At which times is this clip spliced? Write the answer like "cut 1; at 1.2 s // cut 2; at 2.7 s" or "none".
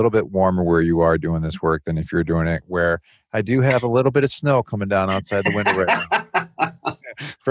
none